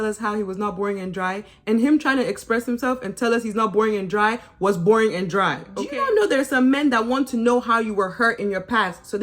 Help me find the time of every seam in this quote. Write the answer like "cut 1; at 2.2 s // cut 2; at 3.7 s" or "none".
cut 1; at 5.7 s

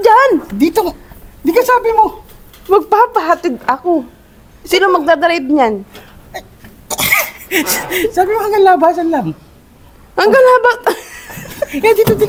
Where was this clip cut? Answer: none

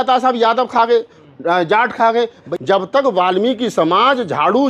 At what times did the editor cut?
cut 1; at 2.5 s

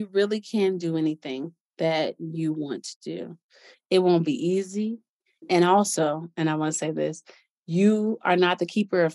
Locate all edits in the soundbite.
cut 1; at 5.4 s

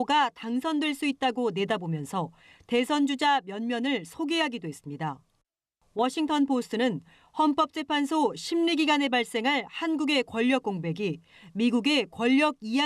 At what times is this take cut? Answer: cut 1; at 7.6 s

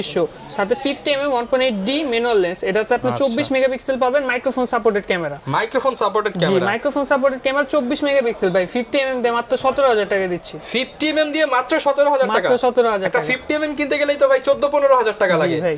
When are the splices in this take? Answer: none

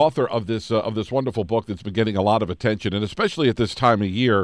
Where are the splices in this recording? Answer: none

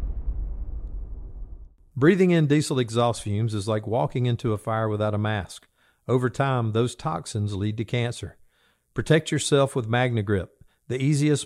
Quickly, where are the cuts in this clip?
cut 1; at 1.7 s

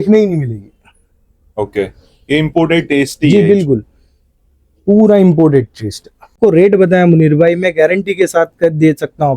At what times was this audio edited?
cut 1; at 6.3 s

